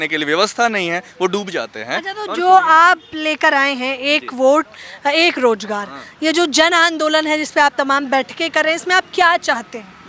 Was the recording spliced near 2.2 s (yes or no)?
no